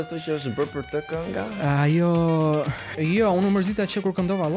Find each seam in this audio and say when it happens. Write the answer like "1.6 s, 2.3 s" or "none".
2.9 s